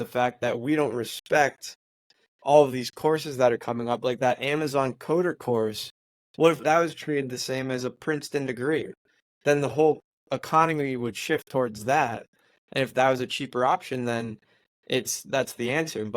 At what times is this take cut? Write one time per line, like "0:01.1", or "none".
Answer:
none